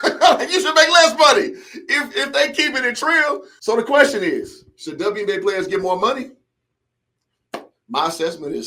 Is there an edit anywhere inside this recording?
yes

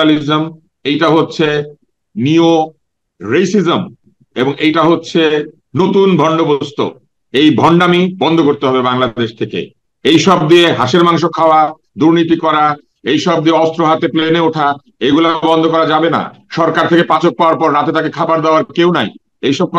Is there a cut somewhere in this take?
no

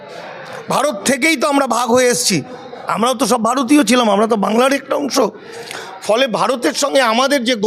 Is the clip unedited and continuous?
yes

